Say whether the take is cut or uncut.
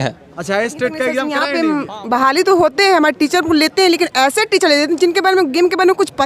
cut